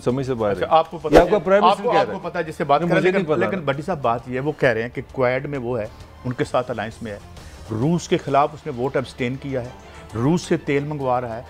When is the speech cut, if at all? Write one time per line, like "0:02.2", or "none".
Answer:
none